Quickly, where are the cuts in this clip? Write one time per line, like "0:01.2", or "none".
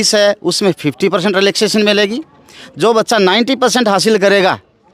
none

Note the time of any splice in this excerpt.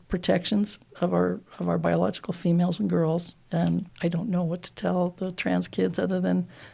0:03.9

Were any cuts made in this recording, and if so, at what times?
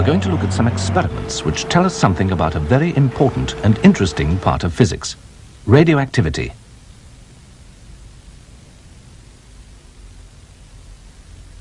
none

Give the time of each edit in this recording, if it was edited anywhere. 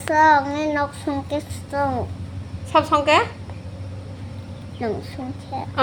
none

